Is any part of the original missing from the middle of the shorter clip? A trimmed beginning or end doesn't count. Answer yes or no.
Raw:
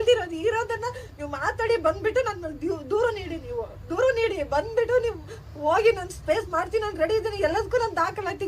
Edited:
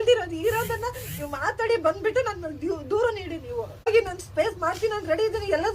yes